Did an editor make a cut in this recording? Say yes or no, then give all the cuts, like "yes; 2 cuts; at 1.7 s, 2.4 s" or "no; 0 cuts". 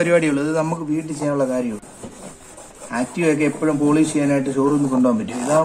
no; 0 cuts